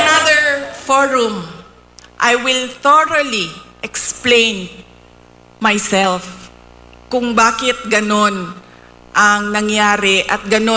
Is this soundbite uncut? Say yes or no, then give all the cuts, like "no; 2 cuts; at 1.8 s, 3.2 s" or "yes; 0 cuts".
yes; 0 cuts